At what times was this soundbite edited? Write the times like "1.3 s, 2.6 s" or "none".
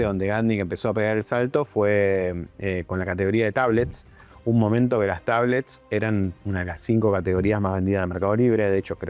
none